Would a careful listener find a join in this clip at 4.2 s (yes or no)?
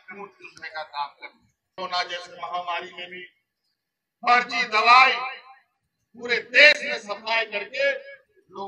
no